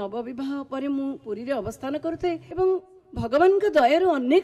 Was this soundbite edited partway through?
yes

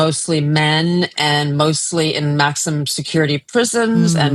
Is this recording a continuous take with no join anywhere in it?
yes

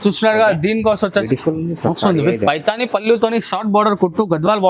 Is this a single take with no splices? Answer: no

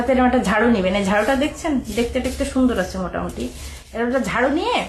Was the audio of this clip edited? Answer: no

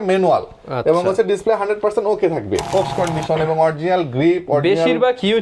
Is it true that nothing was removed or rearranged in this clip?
no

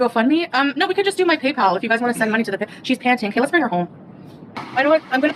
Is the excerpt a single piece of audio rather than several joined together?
no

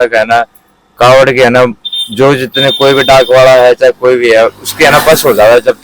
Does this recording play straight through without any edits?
yes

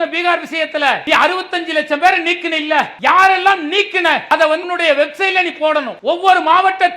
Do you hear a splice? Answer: yes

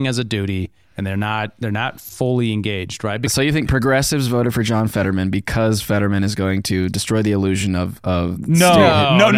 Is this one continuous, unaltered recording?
no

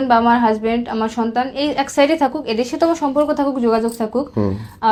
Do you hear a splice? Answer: no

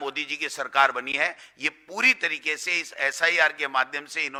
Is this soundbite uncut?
yes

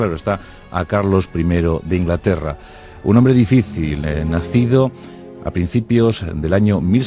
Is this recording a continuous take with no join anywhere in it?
no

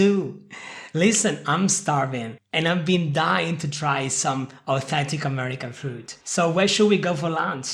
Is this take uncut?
yes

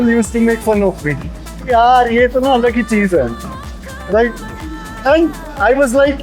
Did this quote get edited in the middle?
no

